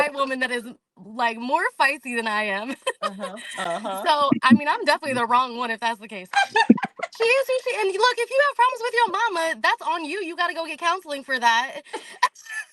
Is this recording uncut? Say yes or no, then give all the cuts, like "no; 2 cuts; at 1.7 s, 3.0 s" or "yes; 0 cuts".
no; 1 cut; at 6.3 s